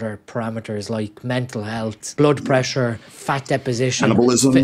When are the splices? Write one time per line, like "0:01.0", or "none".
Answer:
0:02.0
0:03.1